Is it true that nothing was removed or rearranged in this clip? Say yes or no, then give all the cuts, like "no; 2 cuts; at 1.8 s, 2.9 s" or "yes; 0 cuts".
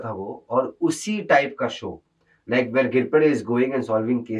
yes; 0 cuts